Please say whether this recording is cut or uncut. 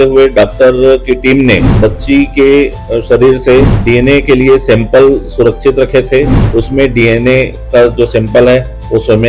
cut